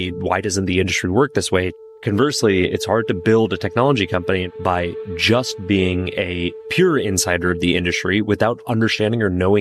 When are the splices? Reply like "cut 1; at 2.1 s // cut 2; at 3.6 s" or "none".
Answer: cut 1; at 1.8 s // cut 2; at 4.5 s